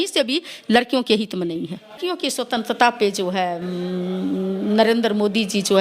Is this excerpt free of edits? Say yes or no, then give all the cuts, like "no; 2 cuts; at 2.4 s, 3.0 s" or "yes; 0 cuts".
no; 1 cut; at 2.0 s